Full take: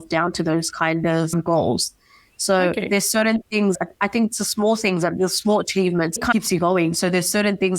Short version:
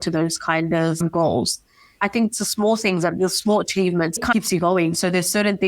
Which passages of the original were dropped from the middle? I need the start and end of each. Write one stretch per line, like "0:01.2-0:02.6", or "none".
0:02.3-0:03.9